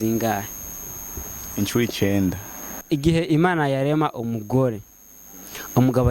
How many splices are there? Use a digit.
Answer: 1